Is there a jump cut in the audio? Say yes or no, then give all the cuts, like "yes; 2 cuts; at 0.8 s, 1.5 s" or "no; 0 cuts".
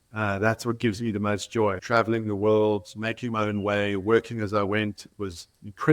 yes; 1 cut; at 1.8 s